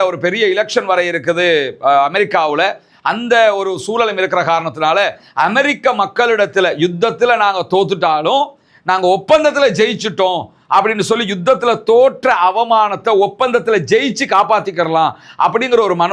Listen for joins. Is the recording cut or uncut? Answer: uncut